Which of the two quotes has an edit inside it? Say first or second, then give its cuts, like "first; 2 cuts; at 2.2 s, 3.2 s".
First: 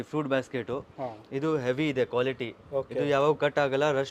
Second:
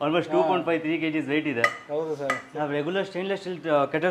second; 1 cut; at 2.5 s